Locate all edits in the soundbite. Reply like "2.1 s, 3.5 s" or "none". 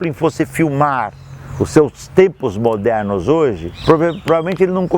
3.7 s